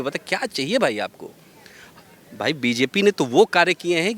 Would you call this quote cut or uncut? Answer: uncut